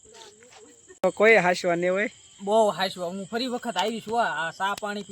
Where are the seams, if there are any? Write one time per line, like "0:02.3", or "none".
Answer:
0:01.0